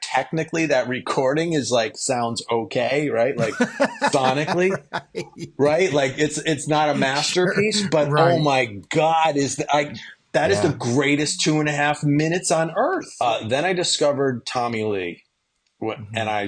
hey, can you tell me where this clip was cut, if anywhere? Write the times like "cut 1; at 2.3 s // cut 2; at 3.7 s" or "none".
cut 1; at 13.1 s